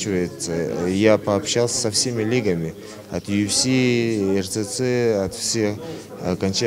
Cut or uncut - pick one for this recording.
uncut